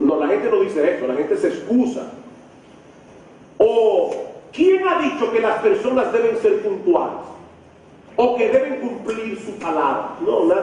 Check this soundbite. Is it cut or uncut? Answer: uncut